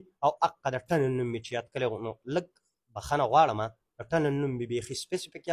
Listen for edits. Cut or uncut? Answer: uncut